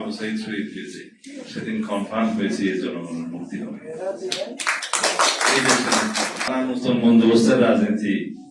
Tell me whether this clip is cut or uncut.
cut